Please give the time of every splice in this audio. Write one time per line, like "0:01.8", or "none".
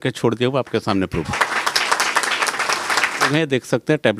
0:01.3
0:03.3